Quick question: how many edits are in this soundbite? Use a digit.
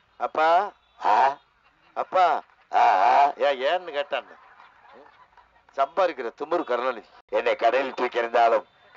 1